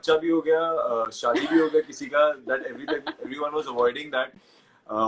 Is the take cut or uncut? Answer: uncut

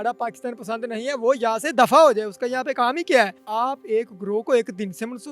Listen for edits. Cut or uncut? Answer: cut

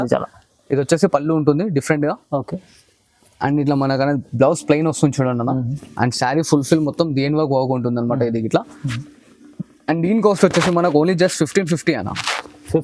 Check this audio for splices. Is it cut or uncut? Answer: uncut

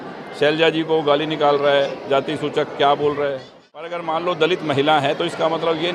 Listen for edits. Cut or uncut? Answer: cut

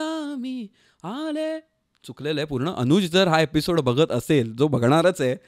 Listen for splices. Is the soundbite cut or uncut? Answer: uncut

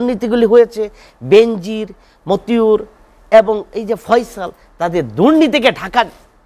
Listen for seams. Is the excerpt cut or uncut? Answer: uncut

